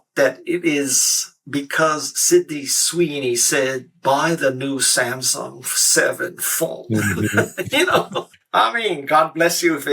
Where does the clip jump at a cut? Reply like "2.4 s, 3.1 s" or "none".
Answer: 8.4 s